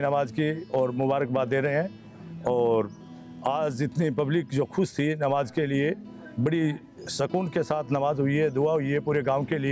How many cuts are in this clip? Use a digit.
0